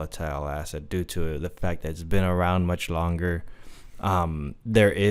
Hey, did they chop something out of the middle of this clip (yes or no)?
no